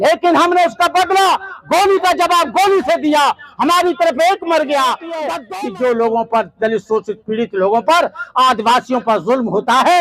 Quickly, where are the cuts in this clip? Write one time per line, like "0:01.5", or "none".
0:05.3

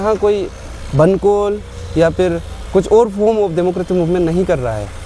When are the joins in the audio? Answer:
none

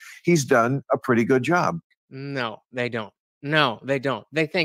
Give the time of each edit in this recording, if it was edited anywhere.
none

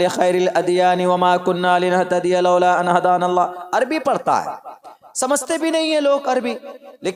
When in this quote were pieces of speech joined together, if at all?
none

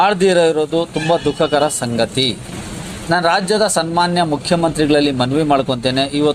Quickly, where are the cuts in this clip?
none

